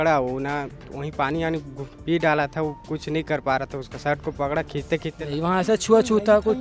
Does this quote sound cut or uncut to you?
cut